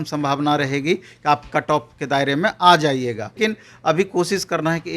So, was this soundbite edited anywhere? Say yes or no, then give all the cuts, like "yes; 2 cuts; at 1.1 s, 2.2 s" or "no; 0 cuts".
yes; 1 cut; at 3.4 s